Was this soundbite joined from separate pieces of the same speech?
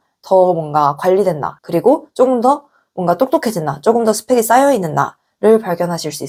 no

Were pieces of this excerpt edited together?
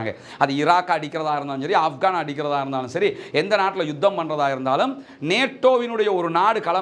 no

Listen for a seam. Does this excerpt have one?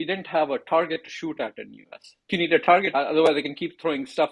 yes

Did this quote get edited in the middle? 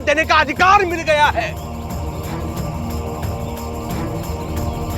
no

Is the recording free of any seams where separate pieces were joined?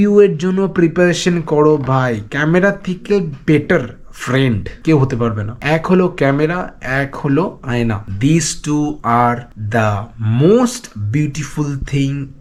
yes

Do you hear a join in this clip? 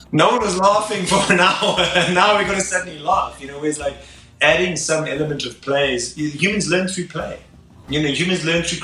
no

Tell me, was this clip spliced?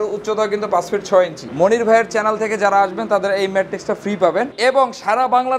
yes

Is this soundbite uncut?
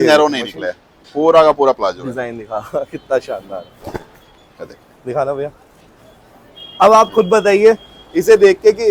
yes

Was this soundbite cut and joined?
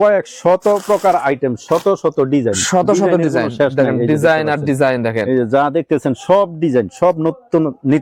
no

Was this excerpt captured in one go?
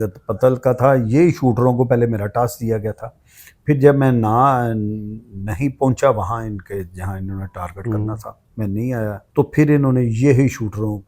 no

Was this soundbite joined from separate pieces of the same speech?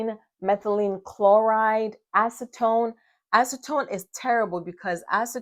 no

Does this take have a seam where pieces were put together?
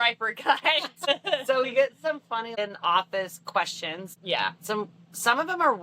yes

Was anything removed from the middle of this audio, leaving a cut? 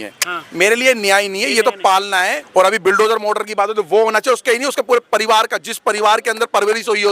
yes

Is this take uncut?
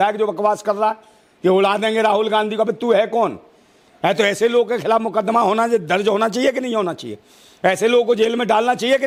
yes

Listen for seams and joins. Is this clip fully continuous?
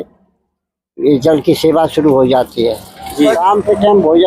no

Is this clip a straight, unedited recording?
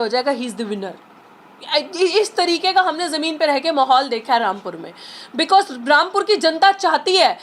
yes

